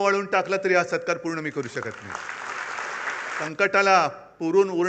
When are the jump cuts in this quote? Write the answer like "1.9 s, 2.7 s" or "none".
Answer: 3.4 s